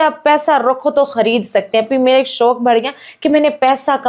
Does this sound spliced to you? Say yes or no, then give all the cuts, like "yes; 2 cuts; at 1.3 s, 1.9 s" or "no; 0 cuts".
no; 0 cuts